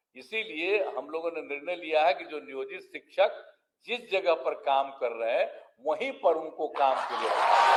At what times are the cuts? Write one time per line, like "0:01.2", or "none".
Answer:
none

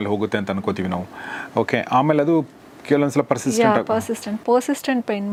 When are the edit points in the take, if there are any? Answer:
none

